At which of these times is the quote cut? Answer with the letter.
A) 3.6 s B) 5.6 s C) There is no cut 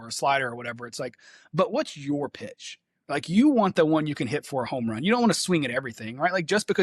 C